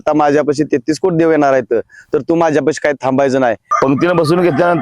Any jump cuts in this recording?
yes; 1 cut; at 3.7 s

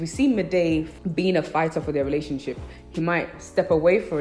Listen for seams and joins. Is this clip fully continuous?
no; 1 cut; at 0.9 s

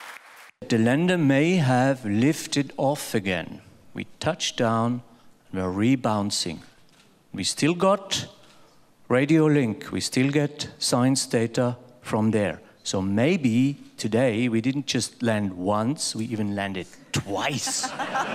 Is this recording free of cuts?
yes; 0 cuts

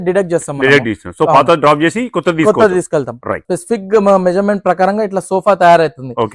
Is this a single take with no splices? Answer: no; 1 cut; at 3.4 s

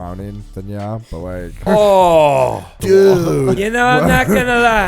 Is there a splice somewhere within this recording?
yes; 3 cuts; at 1.7 s, 2.7 s, 3.6 s

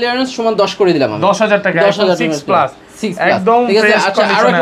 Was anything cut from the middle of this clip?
no; 0 cuts

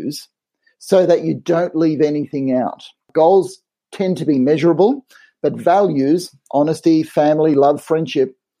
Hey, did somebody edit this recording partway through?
yes; 1 cut; at 3.1 s

